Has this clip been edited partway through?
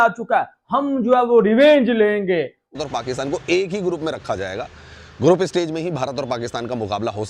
yes; 1 cut; at 2.8 s

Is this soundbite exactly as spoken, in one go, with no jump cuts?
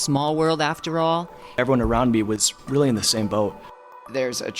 no; 2 cuts; at 1.6 s, 3.8 s

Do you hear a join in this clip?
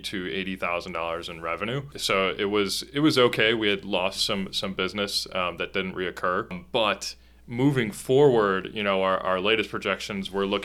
no; 0 cuts

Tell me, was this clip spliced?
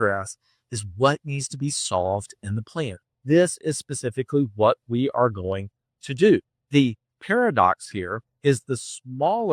yes; 2 cuts; at 6.6 s, 8.2 s

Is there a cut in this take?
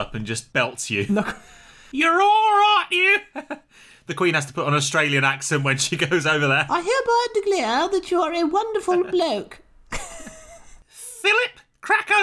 yes; 1 cut; at 1.8 s

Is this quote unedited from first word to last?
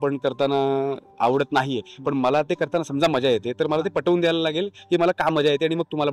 yes; 0 cuts

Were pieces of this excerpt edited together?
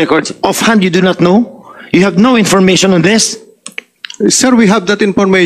no; 0 cuts

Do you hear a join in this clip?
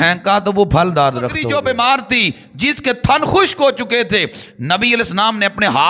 yes; 1 cut; at 1.4 s

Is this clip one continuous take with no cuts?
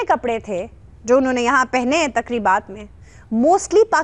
yes; 0 cuts

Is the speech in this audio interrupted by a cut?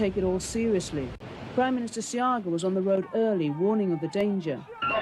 no; 0 cuts

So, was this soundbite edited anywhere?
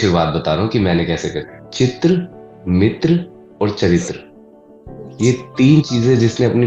yes; 1 cut; at 1.6 s

